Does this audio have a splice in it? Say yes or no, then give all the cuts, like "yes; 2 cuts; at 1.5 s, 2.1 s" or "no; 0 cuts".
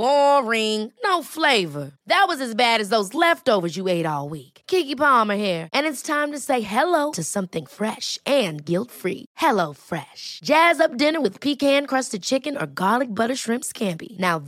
no; 0 cuts